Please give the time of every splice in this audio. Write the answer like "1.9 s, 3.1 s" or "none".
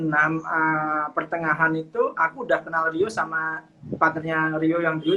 none